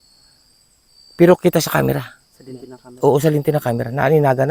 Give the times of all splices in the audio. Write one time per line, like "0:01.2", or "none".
none